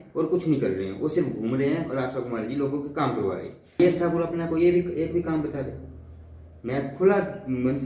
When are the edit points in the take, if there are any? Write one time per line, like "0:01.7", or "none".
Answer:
0:03.8